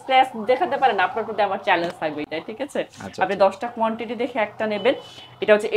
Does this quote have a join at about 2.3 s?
no; 0 cuts

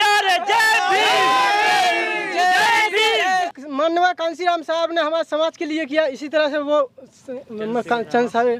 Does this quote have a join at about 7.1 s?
no; 1 cut; at 3.5 s

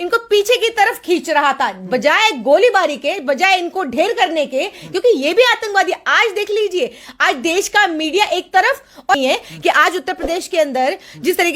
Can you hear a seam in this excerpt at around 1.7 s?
yes; 2 cuts; at 1.7 s, 9.2 s

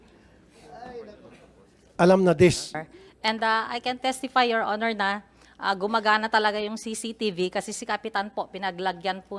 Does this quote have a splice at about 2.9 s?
yes; 1 cut; at 2.9 s

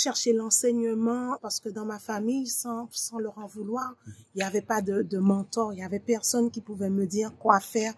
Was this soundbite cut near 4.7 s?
no; 1 cut; at 1.4 s

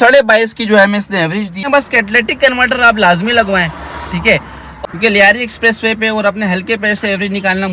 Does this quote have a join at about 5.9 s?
no; 2 cuts; at 1.6 s, 4.7 s

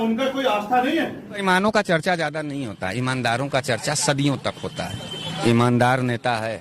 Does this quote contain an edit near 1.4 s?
yes; 1 cut; at 1.4 s

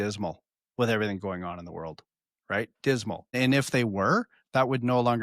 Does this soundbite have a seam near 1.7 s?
no; 1 cut; at 3.3 s

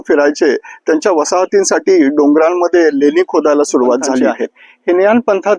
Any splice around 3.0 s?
no; 1 cut; at 4.4 s

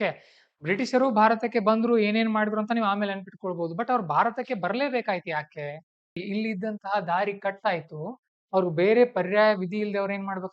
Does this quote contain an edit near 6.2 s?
yes; 1 cut; at 6.2 s

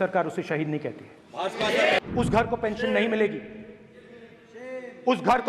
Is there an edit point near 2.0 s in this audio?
yes; 1 cut; at 2.0 s

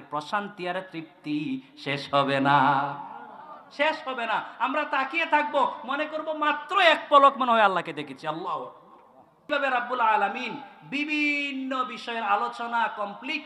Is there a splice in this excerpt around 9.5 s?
yes; 1 cut; at 9.5 s

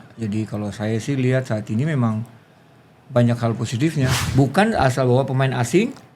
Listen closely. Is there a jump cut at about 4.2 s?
yes; 1 cut; at 4.2 s

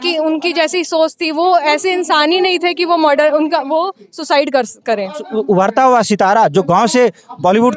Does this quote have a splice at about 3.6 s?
no; 1 cut; at 5.2 s

